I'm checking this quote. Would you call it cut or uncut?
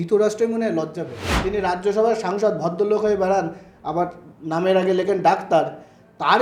cut